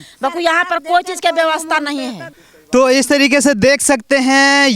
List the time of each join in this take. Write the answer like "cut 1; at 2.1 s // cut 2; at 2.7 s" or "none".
none